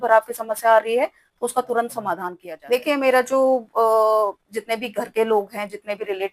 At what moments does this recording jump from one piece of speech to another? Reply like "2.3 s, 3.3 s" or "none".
2.3 s

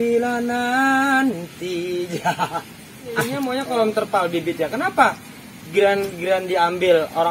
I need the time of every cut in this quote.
3.3 s

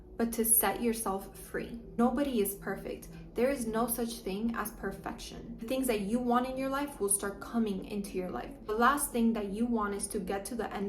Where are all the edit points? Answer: 1.8 s, 5.5 s, 8.5 s

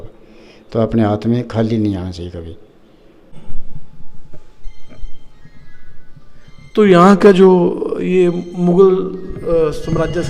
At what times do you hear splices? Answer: 3.3 s

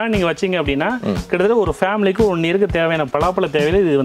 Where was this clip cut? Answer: 3.1 s

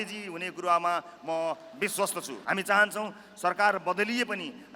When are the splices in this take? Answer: 2.3 s

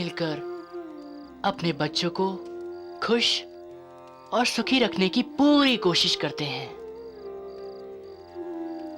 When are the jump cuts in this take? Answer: none

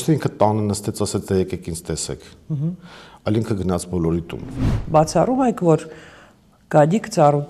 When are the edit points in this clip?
4.7 s

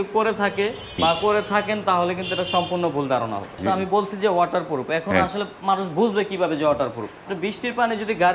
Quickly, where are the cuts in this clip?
1.0 s, 3.6 s, 7.3 s

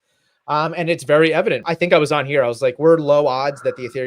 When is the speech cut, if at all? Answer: 1.6 s

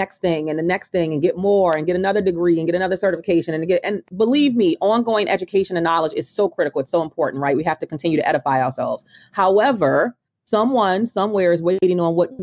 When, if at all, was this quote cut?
4.0 s

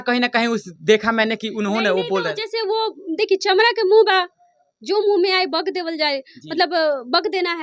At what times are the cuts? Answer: none

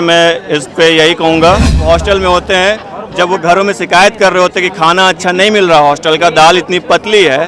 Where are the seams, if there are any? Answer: 1.8 s

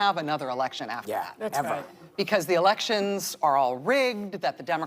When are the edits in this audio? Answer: 1.2 s, 2.0 s

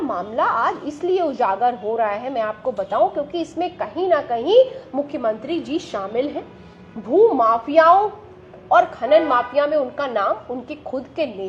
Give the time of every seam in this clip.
none

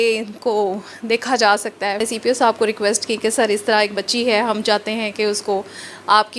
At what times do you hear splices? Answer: 2.0 s

